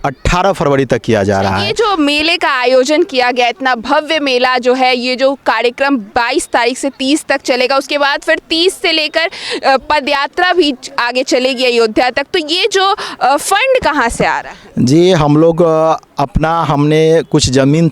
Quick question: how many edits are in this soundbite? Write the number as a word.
one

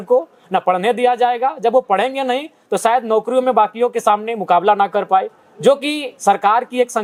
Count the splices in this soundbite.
zero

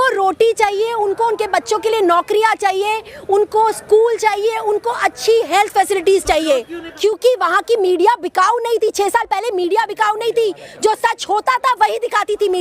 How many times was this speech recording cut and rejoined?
one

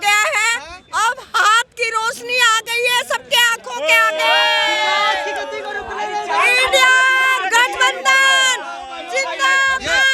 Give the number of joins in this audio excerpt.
zero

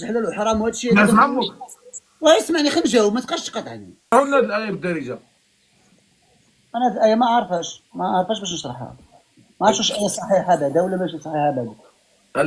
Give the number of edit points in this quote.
one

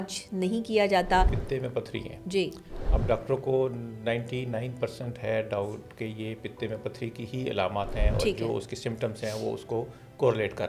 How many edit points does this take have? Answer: one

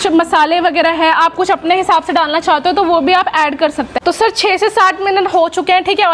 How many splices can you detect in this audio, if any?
one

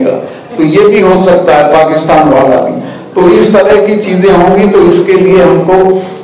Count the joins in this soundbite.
zero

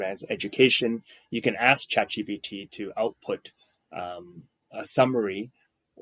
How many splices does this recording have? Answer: zero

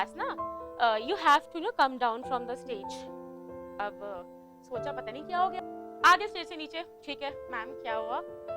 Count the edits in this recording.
one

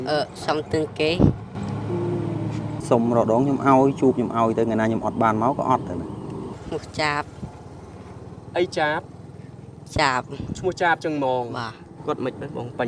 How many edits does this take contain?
two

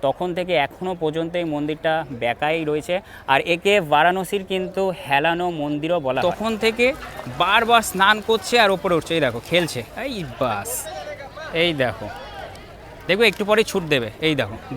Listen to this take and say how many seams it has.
one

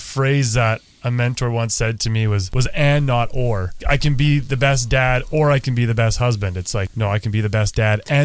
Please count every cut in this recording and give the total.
three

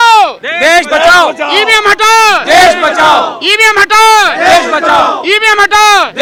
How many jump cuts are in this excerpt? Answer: zero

